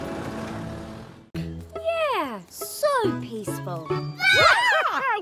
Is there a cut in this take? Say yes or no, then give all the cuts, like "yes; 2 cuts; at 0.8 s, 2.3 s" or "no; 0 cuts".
yes; 1 cut; at 1.3 s